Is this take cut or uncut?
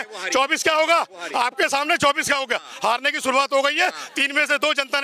uncut